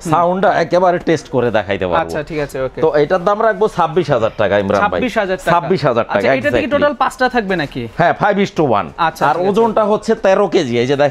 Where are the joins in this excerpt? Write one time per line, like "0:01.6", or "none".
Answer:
none